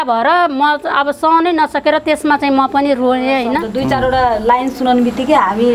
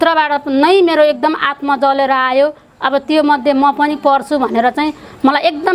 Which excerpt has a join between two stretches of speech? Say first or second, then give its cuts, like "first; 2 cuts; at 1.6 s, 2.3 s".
first; 1 cut; at 3.7 s